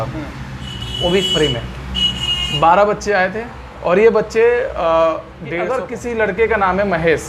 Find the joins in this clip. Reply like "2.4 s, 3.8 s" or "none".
5.5 s